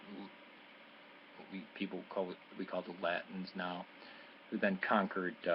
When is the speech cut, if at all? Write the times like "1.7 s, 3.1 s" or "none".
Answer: 1.0 s